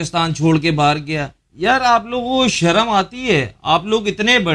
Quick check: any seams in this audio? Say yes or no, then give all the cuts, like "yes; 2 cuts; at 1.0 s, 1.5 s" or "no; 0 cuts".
no; 0 cuts